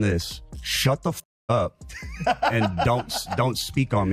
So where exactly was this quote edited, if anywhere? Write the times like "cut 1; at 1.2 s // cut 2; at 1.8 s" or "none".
none